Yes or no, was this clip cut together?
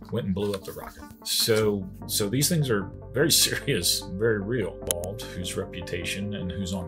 yes